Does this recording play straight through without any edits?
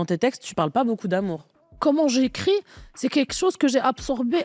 no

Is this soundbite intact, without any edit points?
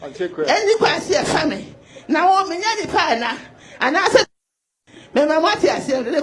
yes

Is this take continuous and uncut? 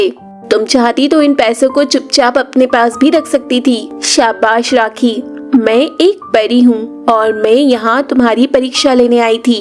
no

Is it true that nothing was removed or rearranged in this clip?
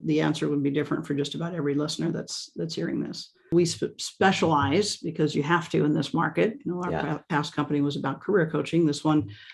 no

